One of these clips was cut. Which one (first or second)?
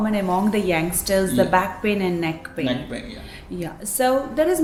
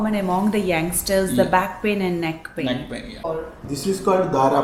second